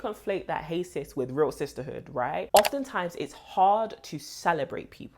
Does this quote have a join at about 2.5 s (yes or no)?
yes